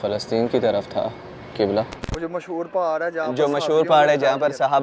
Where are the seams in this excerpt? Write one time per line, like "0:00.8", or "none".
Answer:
0:02.1